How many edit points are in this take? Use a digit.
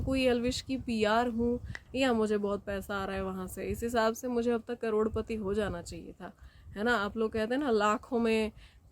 1